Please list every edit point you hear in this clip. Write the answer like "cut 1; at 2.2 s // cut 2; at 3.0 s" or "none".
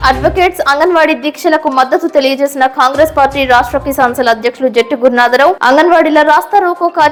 none